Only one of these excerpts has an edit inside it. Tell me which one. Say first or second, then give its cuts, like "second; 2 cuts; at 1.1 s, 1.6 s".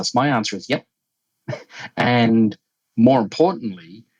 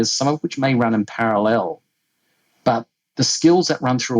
second; 1 cut; at 3.0 s